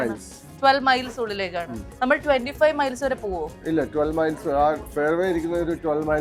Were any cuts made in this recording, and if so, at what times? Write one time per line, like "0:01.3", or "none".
none